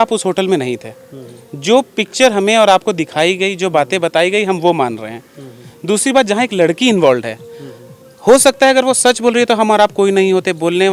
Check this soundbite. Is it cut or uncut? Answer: uncut